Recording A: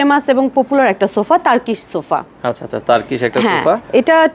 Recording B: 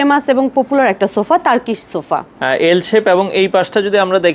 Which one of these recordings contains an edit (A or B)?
B